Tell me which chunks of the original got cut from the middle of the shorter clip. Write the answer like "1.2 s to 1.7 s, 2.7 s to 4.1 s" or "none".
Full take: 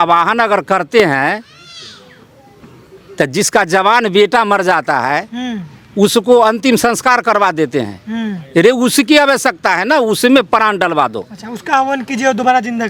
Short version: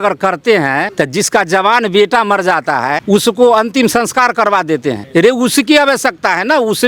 1.4 s to 3.1 s, 5.2 s to 5.9 s, 7.9 s to 8.4 s